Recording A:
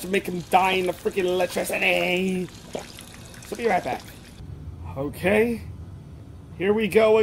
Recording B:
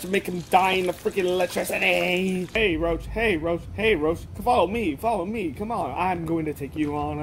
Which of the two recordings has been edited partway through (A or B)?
B